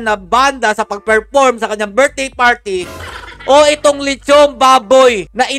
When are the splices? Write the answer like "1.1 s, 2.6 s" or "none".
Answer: none